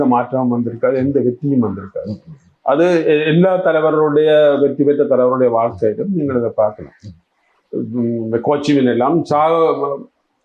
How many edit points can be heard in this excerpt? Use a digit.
0